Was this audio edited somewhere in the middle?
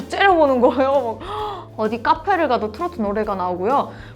yes; 1 cut; at 1.6 s

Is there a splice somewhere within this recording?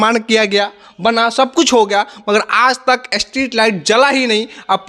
no; 0 cuts

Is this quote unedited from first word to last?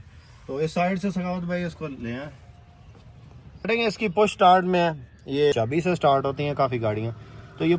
no; 2 cuts; at 3.7 s, 5.5 s

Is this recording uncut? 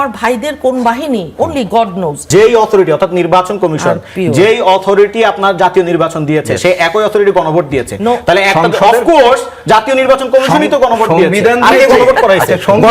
no; 1 cut; at 2.2 s

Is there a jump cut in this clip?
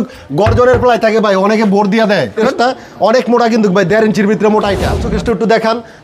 yes; 2 cuts; at 2.4 s, 5.1 s

